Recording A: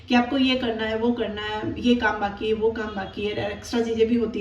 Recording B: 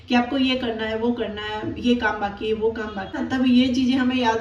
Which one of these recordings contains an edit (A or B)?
B